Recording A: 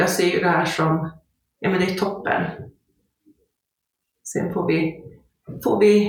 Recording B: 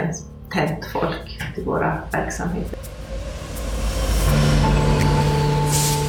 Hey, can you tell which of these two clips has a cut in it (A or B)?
B